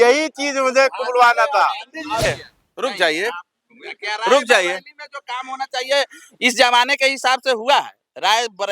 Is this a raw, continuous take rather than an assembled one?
no; 1 cut; at 2.2 s

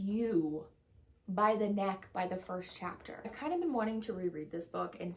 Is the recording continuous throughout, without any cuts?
no; 1 cut; at 3.2 s

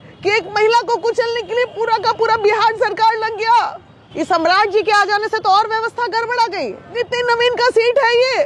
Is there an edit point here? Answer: yes; 2 cuts; at 4.1 s, 6.8 s

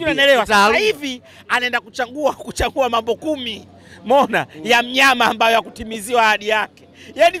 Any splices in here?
no; 0 cuts

